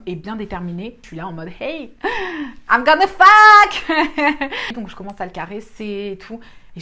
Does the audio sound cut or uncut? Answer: cut